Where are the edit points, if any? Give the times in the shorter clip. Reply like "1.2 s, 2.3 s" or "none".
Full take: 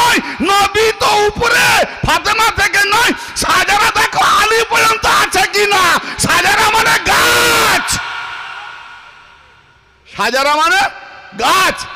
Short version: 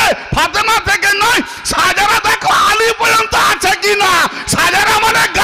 none